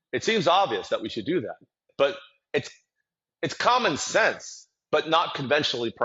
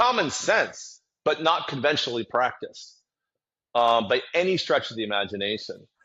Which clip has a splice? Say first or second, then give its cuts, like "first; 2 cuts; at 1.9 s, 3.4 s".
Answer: first; 1 cut; at 1.8 s